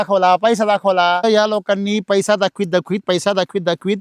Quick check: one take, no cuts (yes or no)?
no